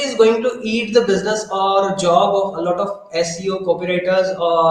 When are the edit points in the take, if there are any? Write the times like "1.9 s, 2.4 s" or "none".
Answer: none